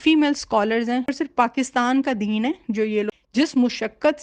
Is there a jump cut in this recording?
yes; 2 cuts; at 1.1 s, 3.1 s

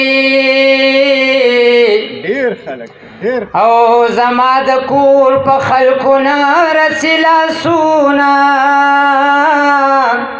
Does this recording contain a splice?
no; 0 cuts

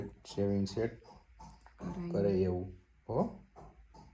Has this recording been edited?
no; 0 cuts

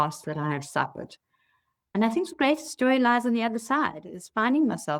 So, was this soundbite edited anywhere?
yes; 1 cut; at 1.9 s

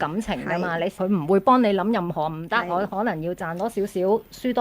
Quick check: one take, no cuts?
no; 1 cut; at 0.9 s

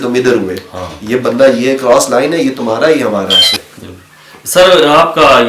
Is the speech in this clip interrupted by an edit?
yes; 1 cut; at 3.5 s

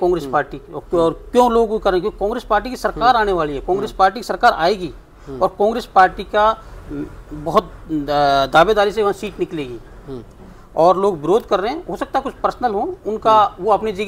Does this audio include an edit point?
no; 0 cuts

